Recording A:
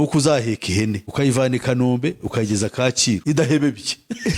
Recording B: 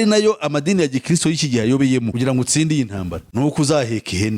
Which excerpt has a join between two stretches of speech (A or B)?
B